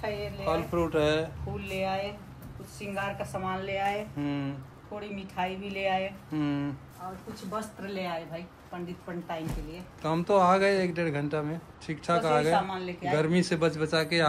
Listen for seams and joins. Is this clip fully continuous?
yes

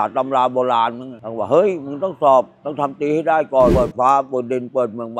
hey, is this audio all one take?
no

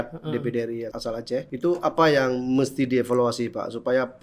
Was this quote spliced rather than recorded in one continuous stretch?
yes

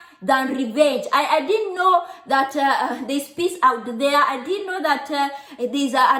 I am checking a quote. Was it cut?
no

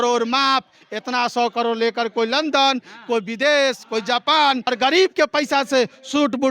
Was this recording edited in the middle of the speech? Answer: yes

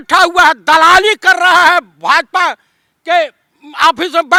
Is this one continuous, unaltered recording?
yes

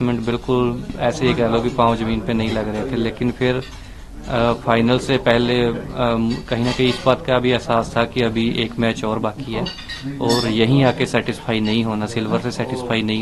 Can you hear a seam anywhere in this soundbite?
no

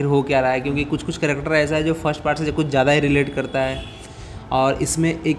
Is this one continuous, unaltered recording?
yes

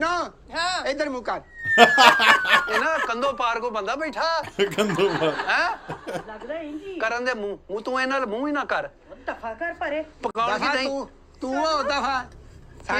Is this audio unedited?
yes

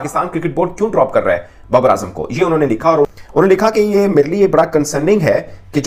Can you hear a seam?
no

